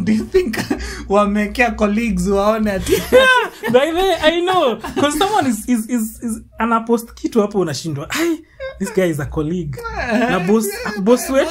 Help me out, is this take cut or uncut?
uncut